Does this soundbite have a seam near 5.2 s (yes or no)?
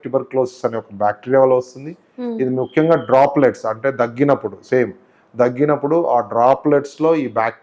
no